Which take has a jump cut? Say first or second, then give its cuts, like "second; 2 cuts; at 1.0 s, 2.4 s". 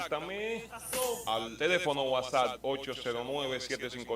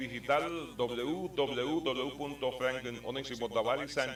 first; 1 cut; at 1.5 s